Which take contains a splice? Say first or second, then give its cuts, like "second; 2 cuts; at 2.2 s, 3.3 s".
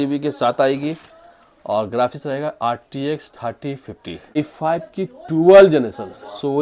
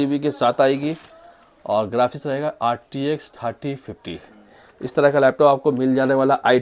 first; 1 cut; at 4.4 s